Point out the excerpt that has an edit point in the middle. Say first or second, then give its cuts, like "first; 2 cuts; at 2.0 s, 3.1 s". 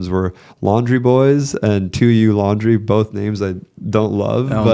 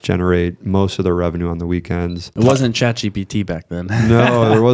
second; 1 cut; at 2.3 s